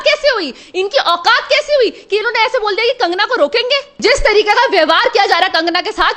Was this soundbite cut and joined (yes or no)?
yes